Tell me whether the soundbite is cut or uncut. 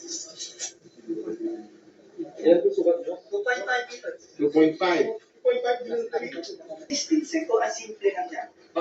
cut